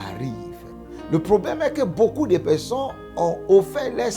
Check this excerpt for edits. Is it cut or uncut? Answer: cut